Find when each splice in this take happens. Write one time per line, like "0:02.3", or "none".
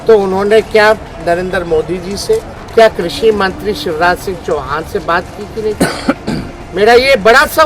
0:02.6
0:06.6